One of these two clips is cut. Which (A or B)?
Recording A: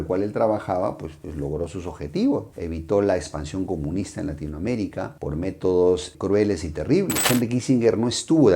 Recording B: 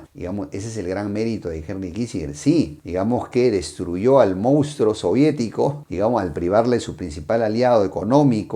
A